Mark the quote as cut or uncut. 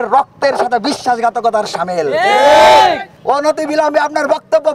cut